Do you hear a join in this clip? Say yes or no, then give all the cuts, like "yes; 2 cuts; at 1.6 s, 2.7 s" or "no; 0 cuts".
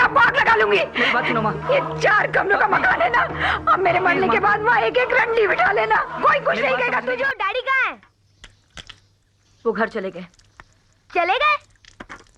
yes; 1 cut; at 7.3 s